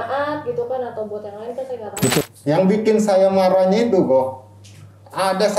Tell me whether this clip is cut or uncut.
cut